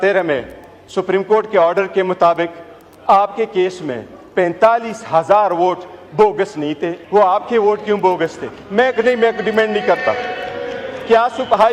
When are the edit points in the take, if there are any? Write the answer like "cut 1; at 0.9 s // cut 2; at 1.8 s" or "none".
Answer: cut 1; at 6.9 s